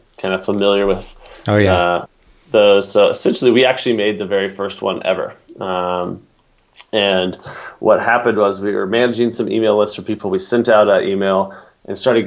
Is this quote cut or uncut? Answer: uncut